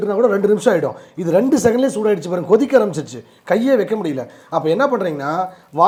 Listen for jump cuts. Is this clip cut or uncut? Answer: uncut